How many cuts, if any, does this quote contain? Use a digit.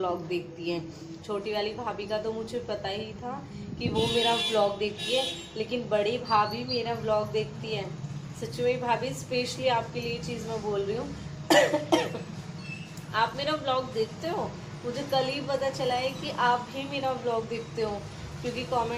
0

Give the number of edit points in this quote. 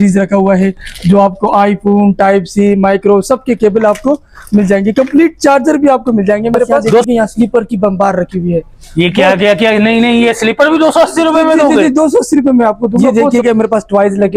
2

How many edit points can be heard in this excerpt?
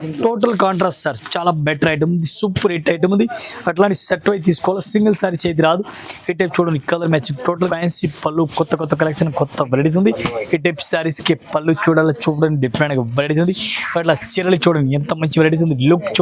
1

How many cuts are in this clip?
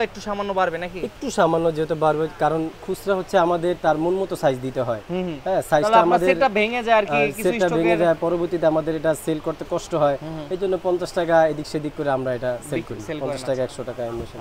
0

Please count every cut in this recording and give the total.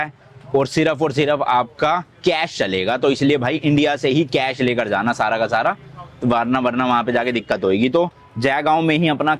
0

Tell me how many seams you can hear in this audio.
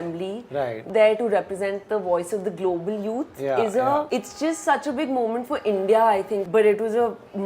3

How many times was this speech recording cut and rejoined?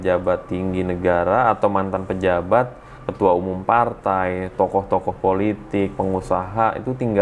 0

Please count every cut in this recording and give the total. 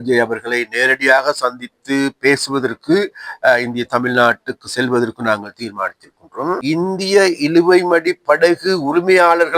1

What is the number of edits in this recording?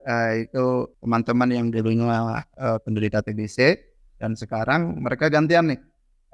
2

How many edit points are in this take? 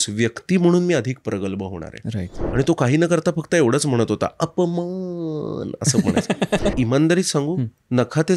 2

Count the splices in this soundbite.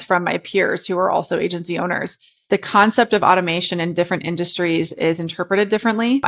1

